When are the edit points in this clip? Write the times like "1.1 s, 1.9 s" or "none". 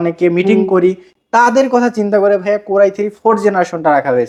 none